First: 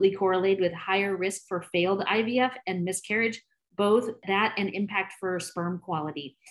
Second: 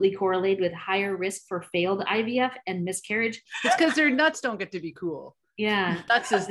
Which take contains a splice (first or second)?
second